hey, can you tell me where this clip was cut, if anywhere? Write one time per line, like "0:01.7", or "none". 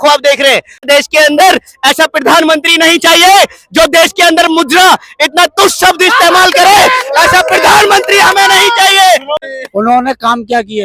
0:00.8
0:09.5